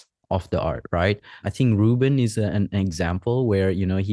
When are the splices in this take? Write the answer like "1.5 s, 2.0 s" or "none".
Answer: 1.4 s